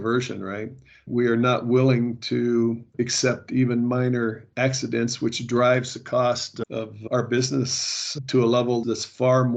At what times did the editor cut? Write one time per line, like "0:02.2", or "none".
0:01.1
0:06.5
0:08.8